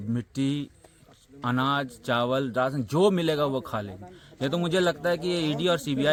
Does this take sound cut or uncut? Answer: uncut